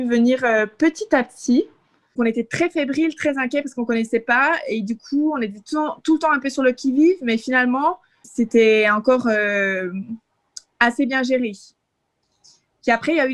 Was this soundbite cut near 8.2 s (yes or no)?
yes